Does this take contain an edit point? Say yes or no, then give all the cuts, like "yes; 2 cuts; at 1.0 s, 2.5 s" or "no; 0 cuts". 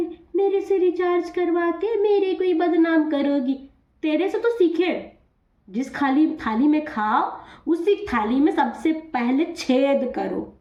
no; 0 cuts